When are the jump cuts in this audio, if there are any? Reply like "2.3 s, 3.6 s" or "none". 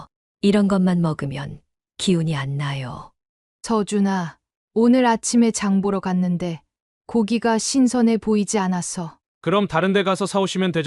none